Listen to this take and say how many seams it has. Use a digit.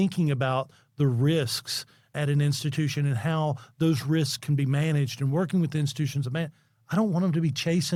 0